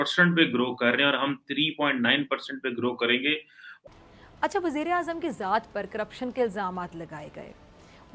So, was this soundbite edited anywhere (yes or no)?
yes